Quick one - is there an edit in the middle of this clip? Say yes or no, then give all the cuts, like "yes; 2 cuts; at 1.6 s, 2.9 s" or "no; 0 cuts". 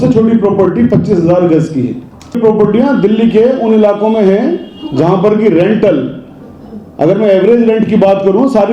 yes; 1 cut; at 2.4 s